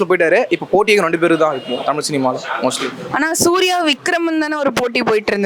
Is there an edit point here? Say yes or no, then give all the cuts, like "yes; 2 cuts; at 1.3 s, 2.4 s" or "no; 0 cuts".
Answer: no; 0 cuts